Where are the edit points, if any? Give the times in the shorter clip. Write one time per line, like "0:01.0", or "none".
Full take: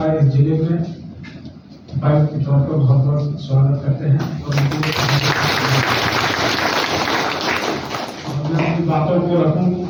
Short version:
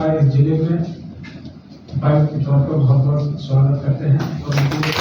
none